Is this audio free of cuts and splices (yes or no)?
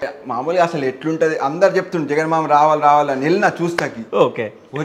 yes